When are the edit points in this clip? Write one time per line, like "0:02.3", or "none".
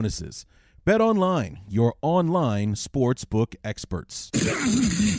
0:04.3